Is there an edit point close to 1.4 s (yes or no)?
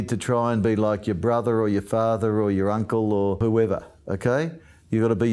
no